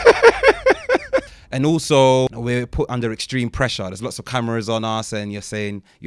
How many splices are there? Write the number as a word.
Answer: two